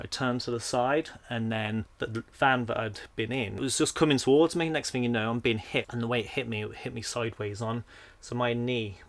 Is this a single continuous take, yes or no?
no